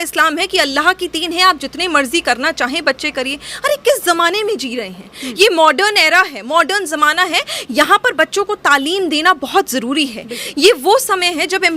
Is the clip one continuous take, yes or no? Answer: yes